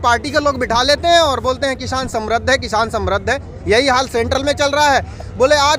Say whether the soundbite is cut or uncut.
uncut